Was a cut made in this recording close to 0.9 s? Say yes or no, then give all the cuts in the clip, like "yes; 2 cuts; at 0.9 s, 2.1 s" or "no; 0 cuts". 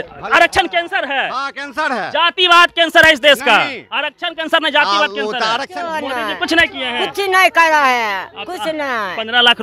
no; 1 cut; at 5.7 s